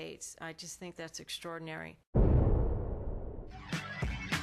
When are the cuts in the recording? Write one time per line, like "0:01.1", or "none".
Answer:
0:03.3